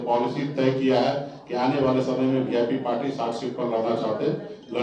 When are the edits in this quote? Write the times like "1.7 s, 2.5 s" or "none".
none

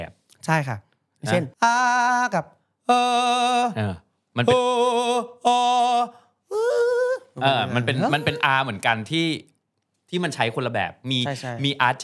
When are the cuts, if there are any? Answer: none

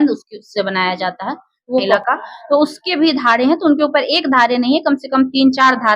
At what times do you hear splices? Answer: 2.0 s

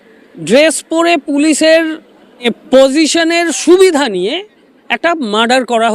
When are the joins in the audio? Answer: 2.4 s

